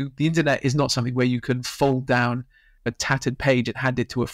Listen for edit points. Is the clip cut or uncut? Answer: uncut